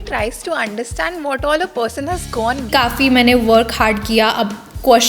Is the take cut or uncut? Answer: cut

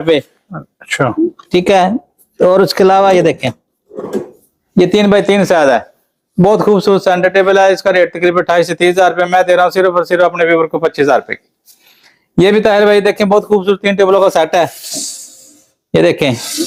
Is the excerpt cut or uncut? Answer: uncut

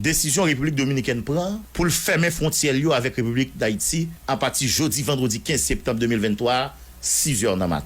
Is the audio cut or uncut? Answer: cut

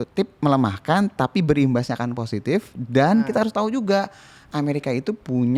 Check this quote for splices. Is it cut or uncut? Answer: uncut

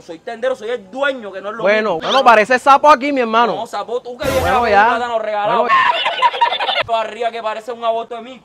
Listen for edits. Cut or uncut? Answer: uncut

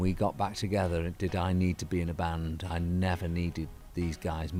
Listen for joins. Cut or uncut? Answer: uncut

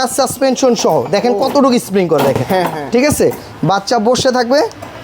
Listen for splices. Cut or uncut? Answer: uncut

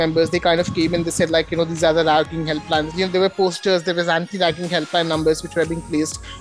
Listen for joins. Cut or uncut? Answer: cut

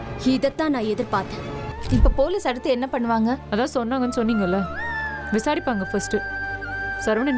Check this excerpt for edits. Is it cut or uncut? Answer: cut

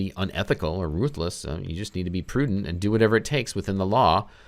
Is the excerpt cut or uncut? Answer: uncut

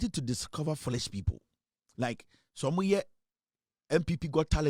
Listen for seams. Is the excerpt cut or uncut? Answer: uncut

